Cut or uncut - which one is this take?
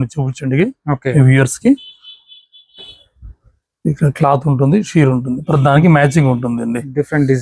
uncut